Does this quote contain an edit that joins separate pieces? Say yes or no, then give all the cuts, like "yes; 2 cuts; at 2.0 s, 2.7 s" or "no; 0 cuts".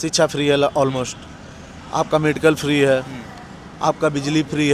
no; 0 cuts